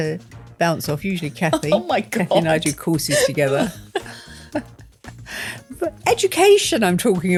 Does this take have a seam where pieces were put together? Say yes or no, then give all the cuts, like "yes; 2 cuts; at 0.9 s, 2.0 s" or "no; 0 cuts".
no; 0 cuts